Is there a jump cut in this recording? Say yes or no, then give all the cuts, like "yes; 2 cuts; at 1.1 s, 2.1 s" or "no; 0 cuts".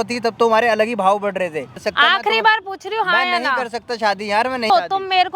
yes; 2 cuts; at 1.8 s, 4.7 s